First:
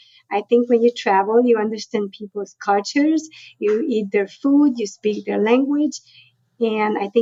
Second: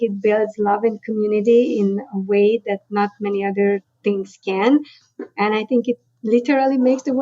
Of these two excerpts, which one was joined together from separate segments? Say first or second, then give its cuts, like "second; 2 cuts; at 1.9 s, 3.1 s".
second; 1 cut; at 3.9 s